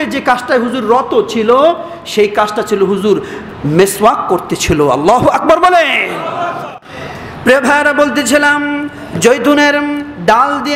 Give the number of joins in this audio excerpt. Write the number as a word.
one